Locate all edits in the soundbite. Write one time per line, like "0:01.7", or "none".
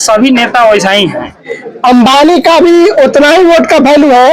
0:01.5